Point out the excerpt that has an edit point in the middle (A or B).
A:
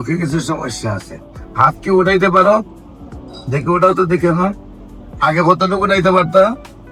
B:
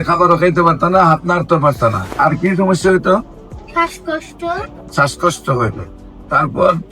B